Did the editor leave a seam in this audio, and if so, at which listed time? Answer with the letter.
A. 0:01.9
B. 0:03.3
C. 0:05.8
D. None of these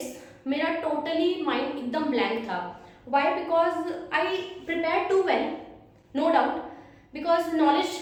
D